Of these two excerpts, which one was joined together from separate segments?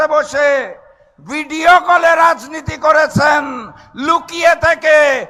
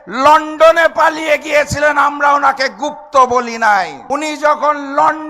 second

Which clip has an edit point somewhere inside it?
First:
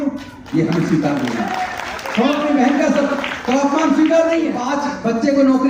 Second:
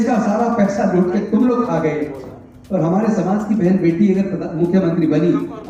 first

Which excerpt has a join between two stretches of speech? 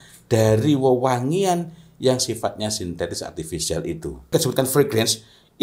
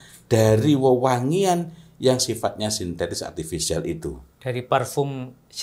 first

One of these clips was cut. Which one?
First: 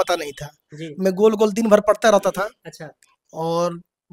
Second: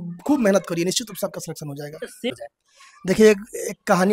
second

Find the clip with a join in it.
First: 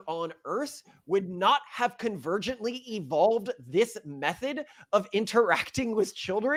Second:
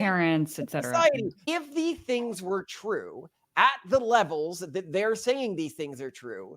second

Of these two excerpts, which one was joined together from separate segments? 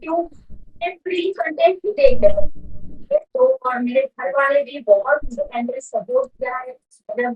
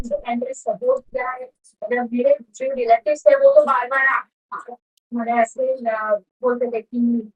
first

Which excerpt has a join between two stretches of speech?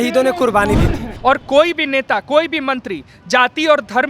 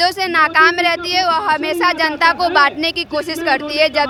first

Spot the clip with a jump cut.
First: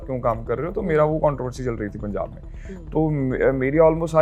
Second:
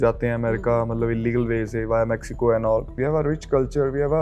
second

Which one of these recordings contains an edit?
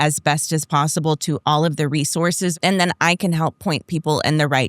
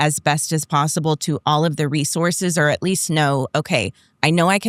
first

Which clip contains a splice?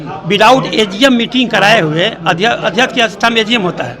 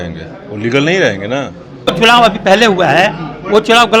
second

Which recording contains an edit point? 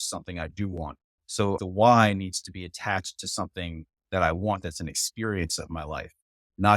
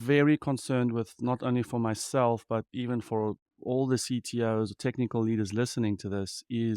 first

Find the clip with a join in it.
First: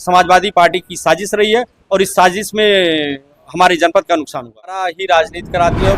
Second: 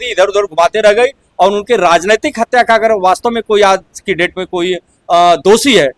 first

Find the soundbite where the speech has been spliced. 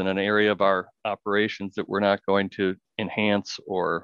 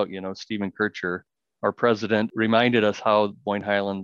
second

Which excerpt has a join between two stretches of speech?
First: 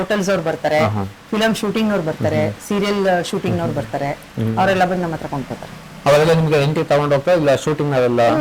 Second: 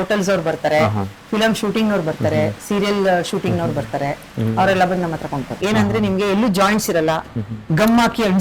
second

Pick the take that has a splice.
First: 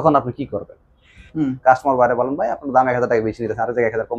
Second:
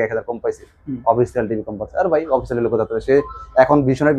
first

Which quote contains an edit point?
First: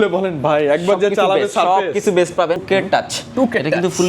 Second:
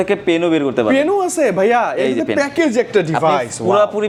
first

